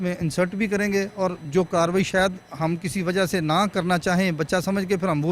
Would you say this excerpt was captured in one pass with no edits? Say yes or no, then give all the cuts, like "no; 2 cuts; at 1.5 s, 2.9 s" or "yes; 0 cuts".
no; 1 cut; at 1.4 s